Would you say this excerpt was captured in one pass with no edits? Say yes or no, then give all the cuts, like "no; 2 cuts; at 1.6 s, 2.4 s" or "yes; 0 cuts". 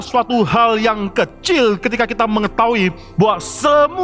yes; 0 cuts